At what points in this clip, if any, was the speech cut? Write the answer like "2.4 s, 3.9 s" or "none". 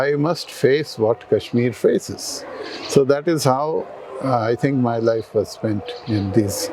none